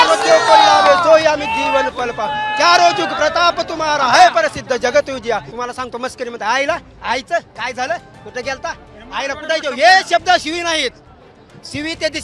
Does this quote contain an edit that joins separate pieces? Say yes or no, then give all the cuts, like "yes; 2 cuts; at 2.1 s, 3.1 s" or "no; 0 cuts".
yes; 1 cut; at 5.5 s